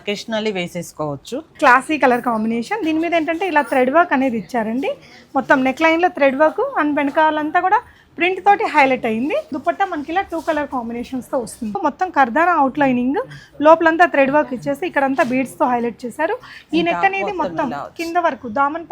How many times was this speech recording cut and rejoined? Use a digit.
3